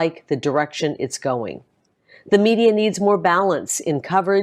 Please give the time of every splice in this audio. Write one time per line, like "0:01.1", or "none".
0:01.8